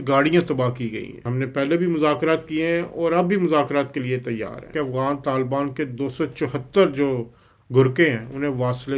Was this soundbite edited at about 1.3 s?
yes; 2 cuts; at 1.3 s, 4.7 s

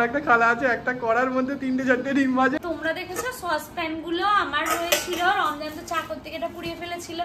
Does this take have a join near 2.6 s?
yes; 1 cut; at 2.6 s

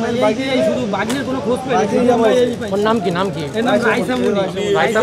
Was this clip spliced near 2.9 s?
no; 0 cuts

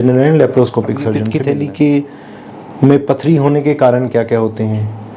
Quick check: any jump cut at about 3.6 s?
no; 1 cut; at 1.2 s

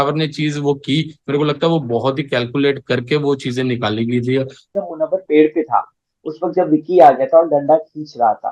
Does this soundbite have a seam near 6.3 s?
no; 1 cut; at 4.7 s

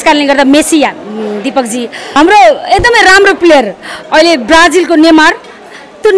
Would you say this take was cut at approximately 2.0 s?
yes; 1 cut; at 2.0 s

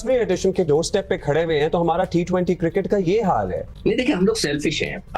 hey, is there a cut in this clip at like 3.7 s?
yes; 1 cut; at 3.7 s

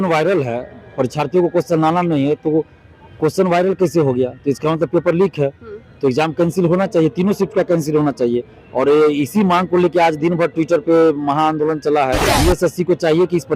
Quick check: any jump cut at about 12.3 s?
yes; 1 cut; at 12.3 s

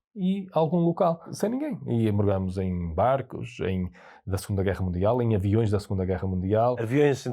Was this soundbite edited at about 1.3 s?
yes; 1 cut; at 1.3 s

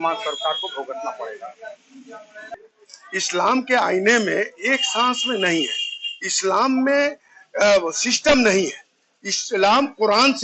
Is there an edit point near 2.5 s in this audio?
yes; 1 cut; at 2.5 s

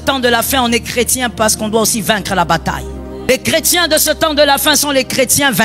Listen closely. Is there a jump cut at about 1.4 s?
no; 1 cut; at 3.3 s

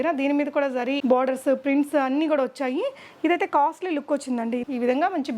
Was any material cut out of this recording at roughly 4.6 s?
yes; 2 cuts; at 1.0 s, 4.6 s

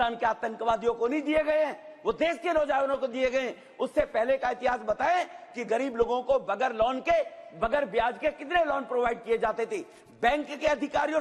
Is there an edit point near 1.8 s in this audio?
no; 0 cuts

